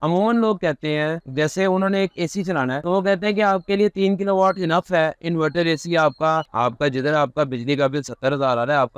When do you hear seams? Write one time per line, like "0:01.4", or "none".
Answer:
0:06.5